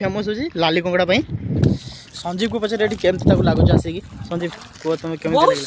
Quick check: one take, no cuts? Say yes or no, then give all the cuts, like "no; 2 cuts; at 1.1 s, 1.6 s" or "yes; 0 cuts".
no; 1 cut; at 1.6 s